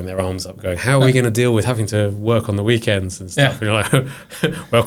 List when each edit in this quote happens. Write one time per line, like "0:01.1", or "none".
none

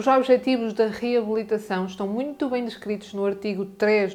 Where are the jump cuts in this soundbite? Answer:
none

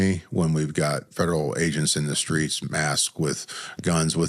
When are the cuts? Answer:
0:01.1

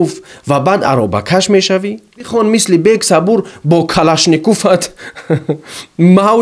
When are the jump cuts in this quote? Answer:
0:02.3

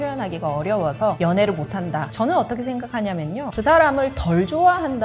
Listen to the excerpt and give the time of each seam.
0:01.2
0:02.1
0:03.5

